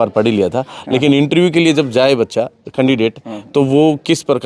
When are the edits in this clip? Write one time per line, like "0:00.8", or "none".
none